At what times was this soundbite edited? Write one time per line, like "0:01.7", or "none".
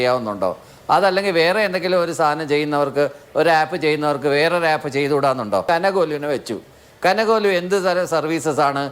0:05.6